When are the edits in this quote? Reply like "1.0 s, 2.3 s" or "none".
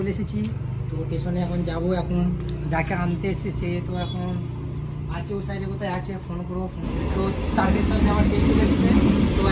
6.9 s